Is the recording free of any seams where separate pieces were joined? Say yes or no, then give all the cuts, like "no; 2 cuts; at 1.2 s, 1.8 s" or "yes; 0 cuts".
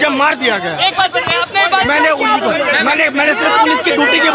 yes; 0 cuts